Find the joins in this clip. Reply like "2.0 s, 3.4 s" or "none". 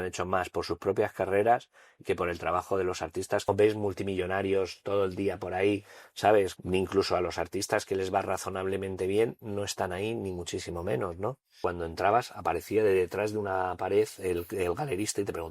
3.5 s, 6.5 s, 11.6 s